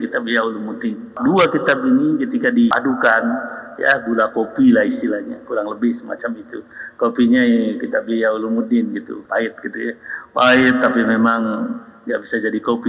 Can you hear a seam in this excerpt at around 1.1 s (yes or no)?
yes